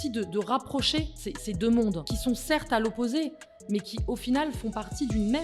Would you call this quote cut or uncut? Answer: cut